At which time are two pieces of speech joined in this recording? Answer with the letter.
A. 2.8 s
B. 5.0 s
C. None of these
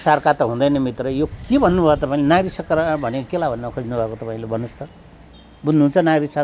C